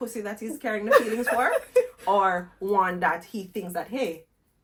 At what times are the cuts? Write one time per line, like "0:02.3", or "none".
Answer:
none